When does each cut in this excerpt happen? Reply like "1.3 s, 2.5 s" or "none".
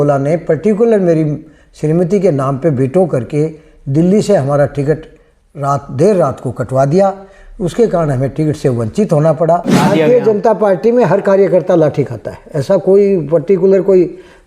9.8 s